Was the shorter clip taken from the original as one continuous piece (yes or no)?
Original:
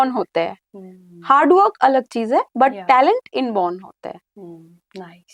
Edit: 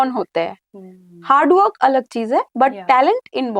yes